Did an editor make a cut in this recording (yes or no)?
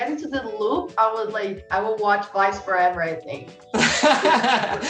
no